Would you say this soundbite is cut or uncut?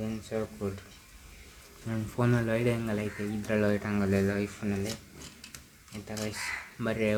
uncut